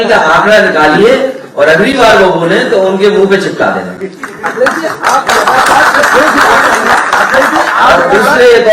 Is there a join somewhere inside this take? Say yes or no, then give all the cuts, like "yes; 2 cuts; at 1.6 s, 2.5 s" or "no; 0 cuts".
no; 0 cuts